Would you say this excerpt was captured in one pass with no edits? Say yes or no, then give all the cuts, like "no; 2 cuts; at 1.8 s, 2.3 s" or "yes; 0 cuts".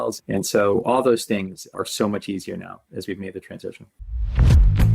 no; 1 cut; at 4.0 s